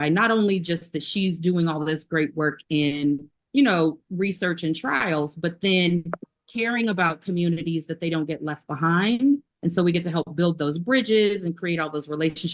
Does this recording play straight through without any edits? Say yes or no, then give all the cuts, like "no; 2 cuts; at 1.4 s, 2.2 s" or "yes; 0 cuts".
yes; 0 cuts